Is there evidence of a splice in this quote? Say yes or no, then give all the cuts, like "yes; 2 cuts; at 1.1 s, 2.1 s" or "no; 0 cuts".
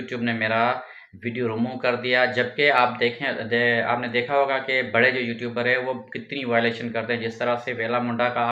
no; 0 cuts